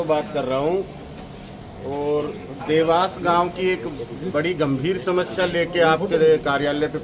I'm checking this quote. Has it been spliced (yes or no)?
no